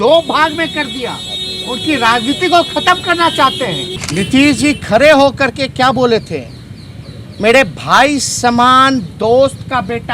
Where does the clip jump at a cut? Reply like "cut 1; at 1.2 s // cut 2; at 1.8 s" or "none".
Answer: cut 1; at 4.0 s